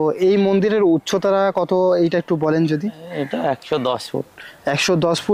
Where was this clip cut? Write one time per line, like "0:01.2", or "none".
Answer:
none